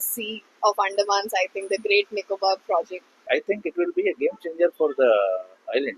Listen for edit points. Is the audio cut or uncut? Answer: cut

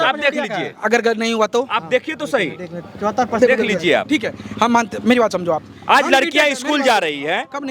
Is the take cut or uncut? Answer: uncut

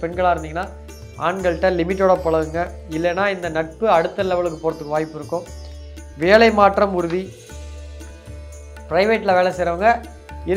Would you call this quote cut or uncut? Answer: uncut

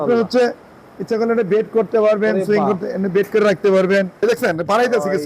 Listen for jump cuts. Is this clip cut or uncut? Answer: cut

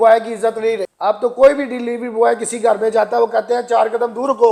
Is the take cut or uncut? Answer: uncut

